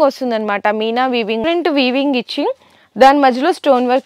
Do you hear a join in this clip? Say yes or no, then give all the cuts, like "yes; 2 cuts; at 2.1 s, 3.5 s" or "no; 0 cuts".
yes; 1 cut; at 1.4 s